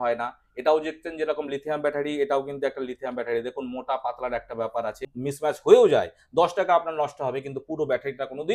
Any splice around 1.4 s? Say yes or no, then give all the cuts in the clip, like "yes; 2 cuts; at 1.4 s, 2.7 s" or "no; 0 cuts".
no; 1 cut; at 5.1 s